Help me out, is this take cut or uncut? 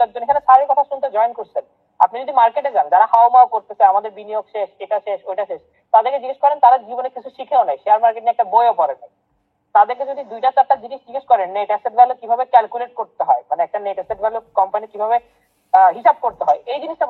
uncut